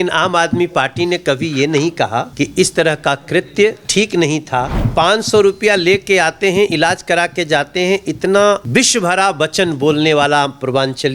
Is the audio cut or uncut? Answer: cut